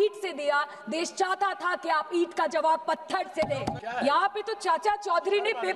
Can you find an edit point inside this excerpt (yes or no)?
yes